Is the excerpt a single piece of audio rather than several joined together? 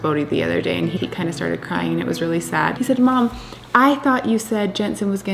no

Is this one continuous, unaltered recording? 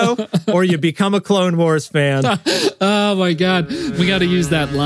no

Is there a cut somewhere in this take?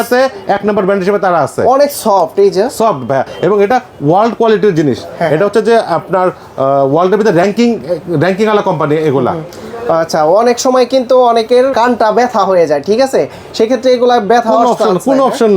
no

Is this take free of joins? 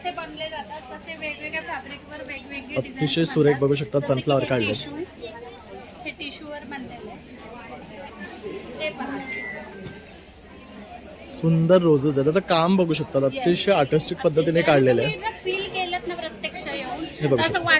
no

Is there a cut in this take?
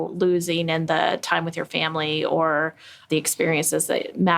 yes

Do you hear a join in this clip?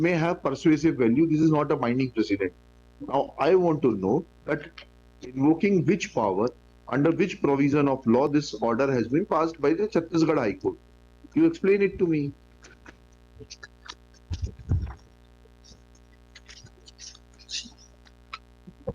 no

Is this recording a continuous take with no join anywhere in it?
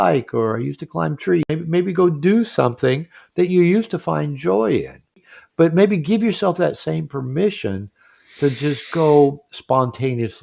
no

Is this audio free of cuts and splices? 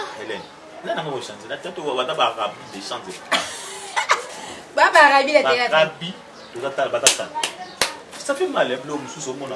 yes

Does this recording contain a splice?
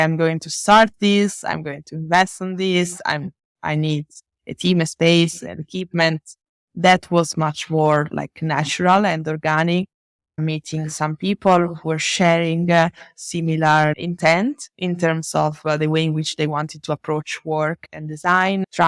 no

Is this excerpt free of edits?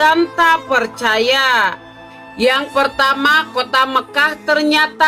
yes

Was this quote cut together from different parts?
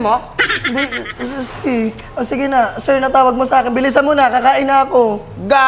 no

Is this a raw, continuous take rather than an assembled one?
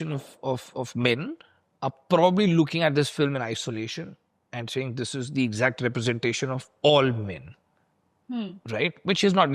yes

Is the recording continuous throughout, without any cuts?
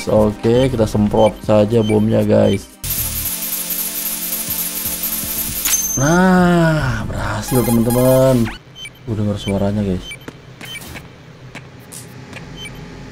no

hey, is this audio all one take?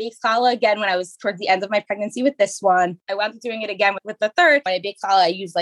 no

